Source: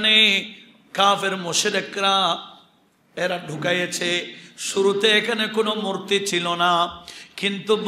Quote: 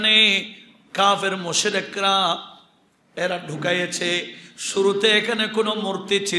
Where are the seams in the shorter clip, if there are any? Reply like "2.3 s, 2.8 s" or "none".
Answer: none